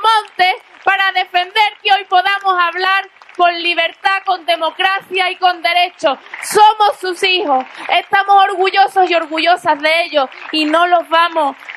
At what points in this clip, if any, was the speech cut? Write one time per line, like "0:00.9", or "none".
none